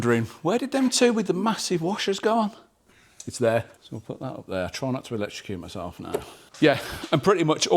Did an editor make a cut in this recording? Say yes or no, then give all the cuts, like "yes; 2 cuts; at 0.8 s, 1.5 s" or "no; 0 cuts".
yes; 2 cuts; at 3.8 s, 6.4 s